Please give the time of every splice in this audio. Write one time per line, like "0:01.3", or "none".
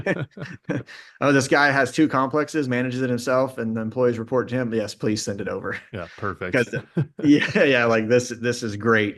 none